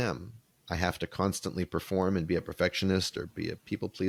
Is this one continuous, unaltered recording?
yes; 0 cuts

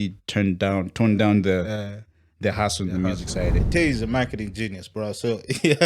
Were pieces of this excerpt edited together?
yes; 1 cut; at 3.6 s

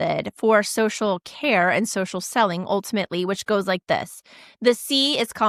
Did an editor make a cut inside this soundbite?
no; 0 cuts

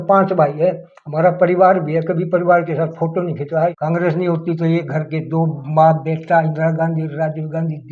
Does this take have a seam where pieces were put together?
yes; 1 cut; at 3.8 s

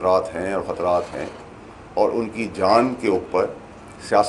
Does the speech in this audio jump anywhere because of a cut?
no; 0 cuts

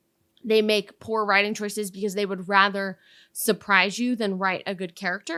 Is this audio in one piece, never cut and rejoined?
yes; 0 cuts

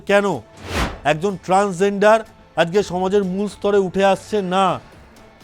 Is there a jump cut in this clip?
no; 0 cuts

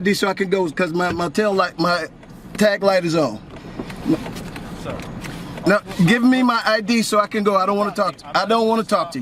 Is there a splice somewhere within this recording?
no; 0 cuts

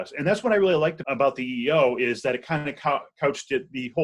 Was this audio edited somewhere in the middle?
yes; 1 cut; at 1.0 s

